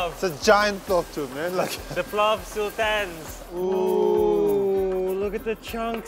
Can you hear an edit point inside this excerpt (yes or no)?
yes